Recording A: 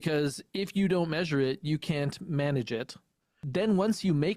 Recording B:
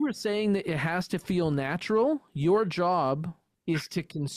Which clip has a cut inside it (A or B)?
A